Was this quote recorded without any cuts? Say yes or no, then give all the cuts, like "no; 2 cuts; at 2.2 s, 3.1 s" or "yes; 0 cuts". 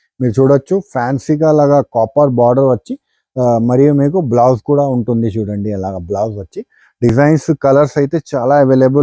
yes; 0 cuts